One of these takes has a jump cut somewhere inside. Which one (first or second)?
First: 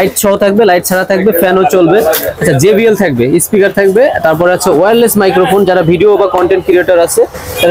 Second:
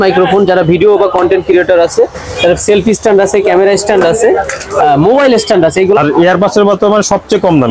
second